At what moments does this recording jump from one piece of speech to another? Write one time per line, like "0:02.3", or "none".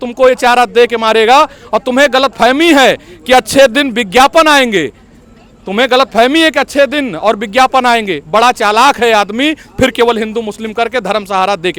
none